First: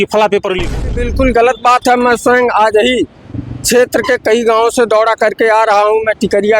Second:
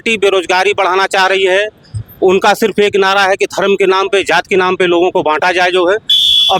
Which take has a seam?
first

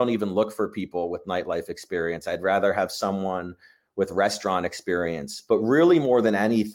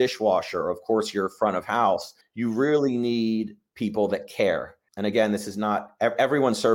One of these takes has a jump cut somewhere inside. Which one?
second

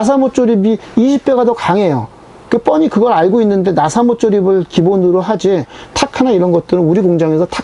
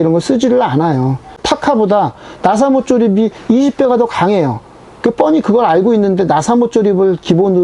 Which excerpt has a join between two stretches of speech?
second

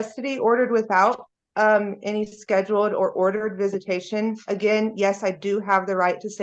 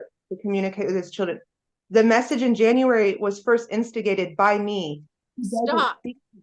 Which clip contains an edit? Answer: second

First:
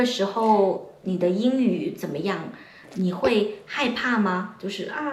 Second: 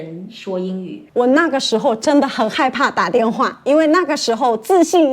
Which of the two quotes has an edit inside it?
second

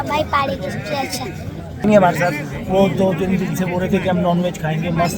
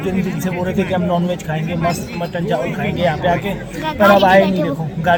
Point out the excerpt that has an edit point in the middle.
first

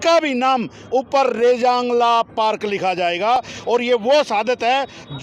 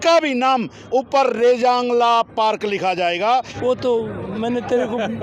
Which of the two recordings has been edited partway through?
second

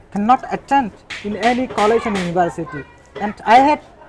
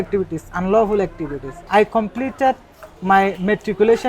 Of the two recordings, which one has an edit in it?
second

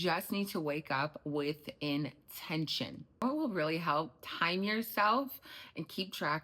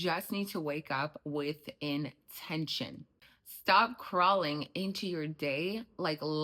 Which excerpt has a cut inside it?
first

